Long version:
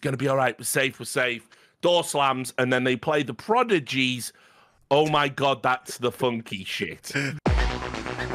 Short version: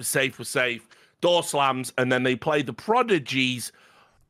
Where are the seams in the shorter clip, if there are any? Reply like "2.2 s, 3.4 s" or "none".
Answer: none